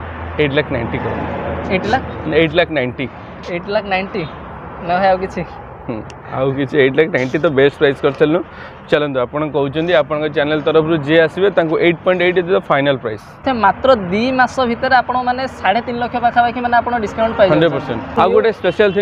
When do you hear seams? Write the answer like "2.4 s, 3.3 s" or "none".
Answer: 13.4 s, 18.1 s